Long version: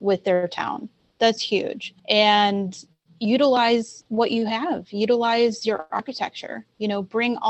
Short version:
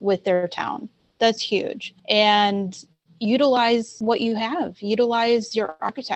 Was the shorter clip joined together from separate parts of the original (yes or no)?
yes